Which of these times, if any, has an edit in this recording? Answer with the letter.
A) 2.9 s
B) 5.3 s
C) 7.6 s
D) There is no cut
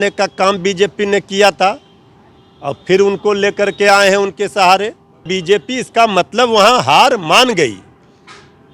B